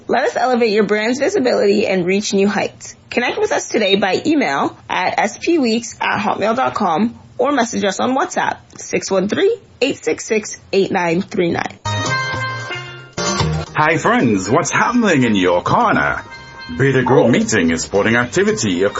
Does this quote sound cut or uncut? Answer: uncut